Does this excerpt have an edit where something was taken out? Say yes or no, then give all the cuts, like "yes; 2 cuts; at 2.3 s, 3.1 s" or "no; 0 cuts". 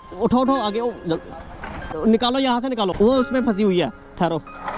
yes; 2 cuts; at 1.9 s, 2.9 s